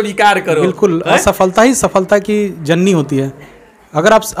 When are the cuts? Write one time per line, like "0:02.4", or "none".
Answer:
none